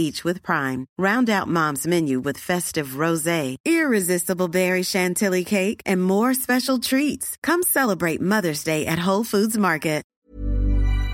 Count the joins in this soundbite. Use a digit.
1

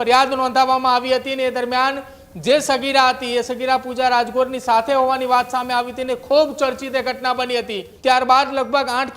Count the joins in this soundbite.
1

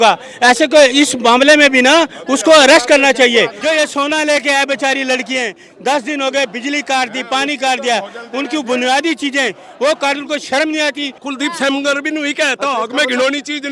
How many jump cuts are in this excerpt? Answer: 2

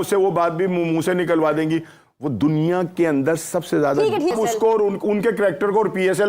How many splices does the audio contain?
1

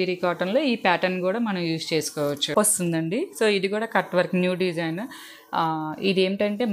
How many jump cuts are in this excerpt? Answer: 1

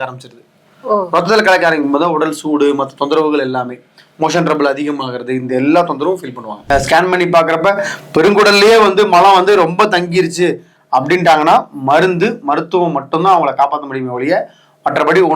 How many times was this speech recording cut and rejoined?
1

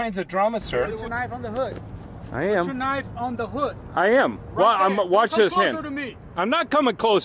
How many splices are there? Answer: 1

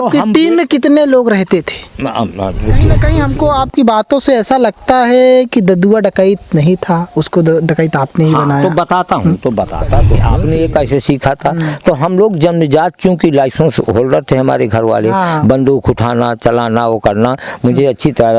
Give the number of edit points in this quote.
2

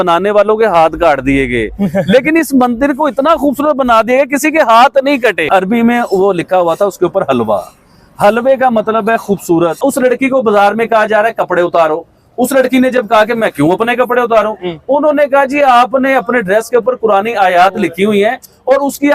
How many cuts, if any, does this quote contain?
2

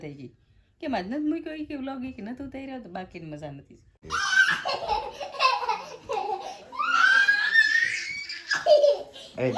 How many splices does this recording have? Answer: 1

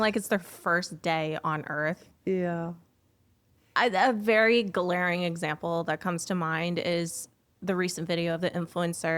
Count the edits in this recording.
0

